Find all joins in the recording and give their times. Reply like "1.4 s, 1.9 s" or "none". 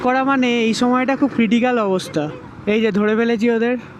2.4 s